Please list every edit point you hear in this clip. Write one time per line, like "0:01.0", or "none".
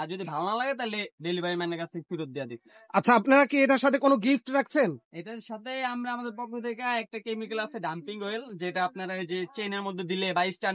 none